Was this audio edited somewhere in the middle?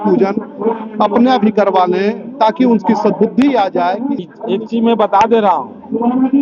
yes; 1 cut; at 4.2 s

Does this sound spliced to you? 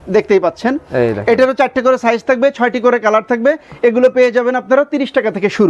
no; 0 cuts

